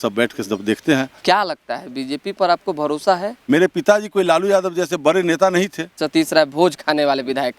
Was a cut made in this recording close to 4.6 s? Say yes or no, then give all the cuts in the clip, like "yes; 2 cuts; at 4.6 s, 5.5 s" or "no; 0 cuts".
no; 3 cuts; at 1.1 s, 3.3 s, 6.0 s